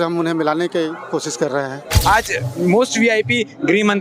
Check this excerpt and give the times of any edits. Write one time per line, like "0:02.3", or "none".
0:01.9